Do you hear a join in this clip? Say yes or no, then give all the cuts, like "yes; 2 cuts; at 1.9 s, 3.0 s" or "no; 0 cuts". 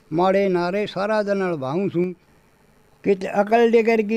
yes; 1 cut; at 2.3 s